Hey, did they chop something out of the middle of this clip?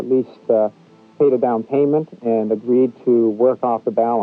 no; 0 cuts

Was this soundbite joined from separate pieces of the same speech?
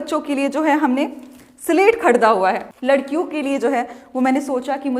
yes; 1 cut; at 2.7 s

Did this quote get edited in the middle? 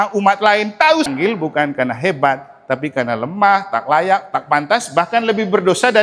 yes; 1 cut; at 1.1 s

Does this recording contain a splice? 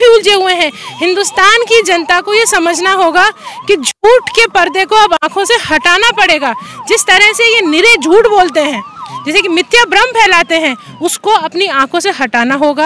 no; 0 cuts

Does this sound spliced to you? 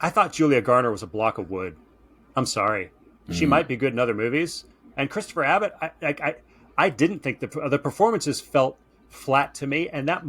no; 0 cuts

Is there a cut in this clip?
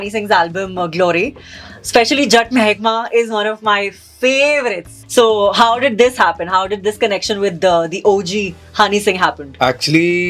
yes; 1 cut; at 4.9 s

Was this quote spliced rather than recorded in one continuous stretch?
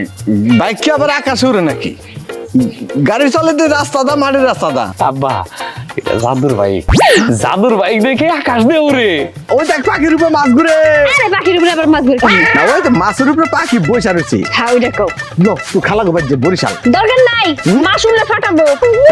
yes; 2 cuts; at 4.9 s, 9.4 s

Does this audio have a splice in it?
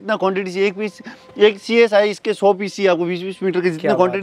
no; 0 cuts

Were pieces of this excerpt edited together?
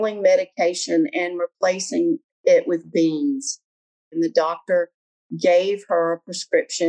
yes; 1 cut; at 4.1 s

